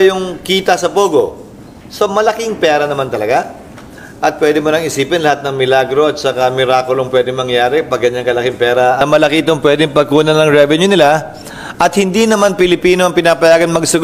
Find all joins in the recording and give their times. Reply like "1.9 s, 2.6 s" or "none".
9.0 s